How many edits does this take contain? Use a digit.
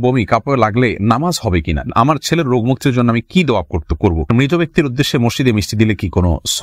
2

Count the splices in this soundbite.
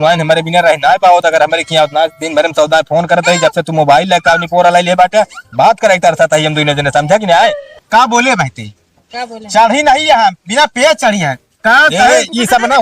1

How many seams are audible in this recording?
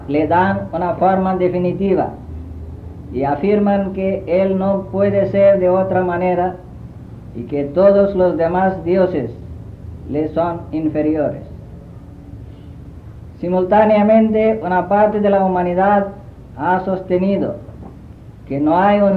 0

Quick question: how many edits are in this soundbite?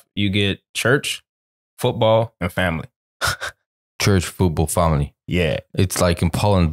0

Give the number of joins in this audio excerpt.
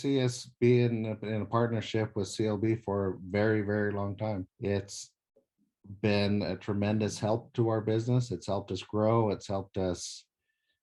1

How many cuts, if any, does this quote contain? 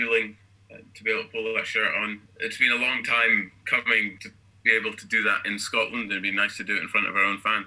2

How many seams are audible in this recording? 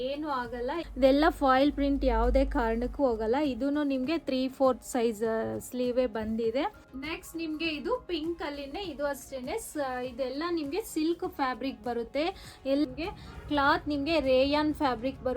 3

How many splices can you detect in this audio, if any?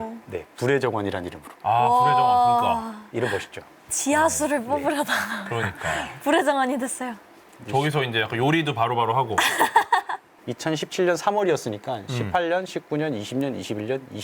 1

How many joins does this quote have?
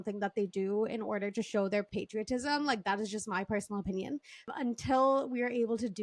2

